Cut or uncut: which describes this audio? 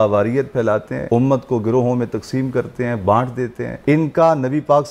cut